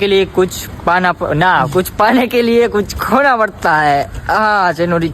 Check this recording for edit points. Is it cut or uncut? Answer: cut